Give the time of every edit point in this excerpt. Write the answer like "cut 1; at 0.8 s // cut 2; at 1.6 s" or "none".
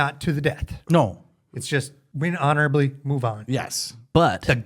cut 1; at 2.0 s